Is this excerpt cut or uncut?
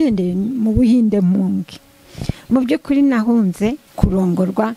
cut